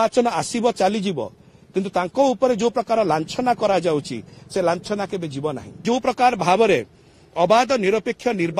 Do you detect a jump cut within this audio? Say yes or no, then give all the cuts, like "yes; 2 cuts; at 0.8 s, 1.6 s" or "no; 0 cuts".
yes; 1 cut; at 5.8 s